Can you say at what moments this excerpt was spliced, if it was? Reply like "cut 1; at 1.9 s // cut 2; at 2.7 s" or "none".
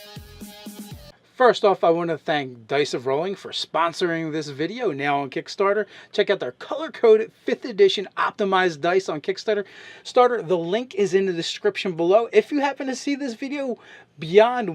cut 1; at 5.2 s